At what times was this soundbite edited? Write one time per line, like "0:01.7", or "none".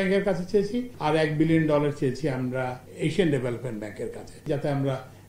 0:00.9
0:02.8
0:04.5